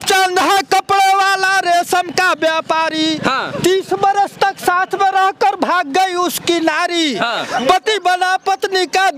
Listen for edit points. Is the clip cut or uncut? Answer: uncut